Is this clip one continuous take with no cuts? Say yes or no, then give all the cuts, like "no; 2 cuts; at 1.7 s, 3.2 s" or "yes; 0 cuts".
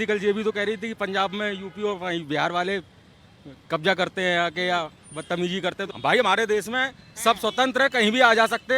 no; 1 cut; at 5.9 s